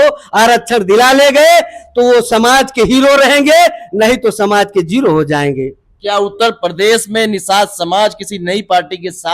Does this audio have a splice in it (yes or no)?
no